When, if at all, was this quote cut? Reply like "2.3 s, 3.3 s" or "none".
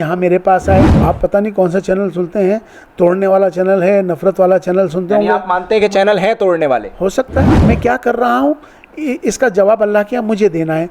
0.9 s, 7.6 s